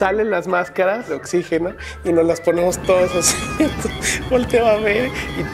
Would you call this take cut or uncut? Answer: cut